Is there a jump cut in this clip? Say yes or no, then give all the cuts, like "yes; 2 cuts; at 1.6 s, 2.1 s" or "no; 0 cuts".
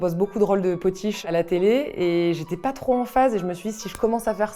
yes; 1 cut; at 1.2 s